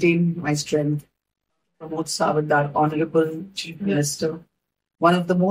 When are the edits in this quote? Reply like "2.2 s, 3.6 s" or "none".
1.7 s